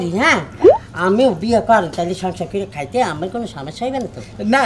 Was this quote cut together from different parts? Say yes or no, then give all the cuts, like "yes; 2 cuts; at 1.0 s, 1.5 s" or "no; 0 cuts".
no; 0 cuts